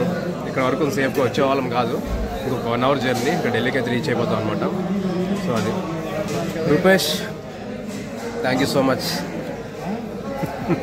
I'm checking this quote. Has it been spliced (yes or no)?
no